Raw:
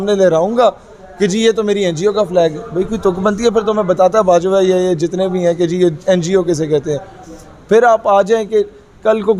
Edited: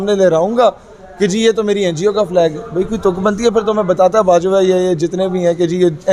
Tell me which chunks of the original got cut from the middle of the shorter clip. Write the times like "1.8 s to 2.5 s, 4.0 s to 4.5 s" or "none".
none